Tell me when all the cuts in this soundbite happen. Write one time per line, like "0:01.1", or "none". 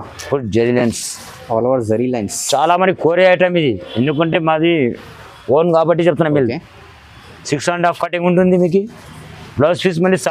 none